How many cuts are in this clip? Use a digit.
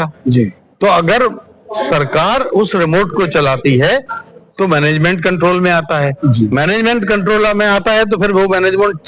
0